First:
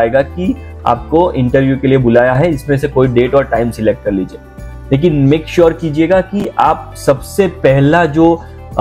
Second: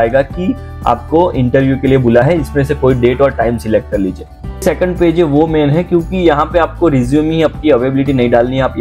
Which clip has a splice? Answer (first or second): second